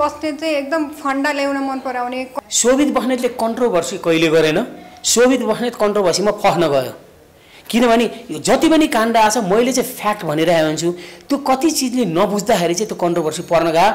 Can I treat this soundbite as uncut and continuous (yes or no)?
no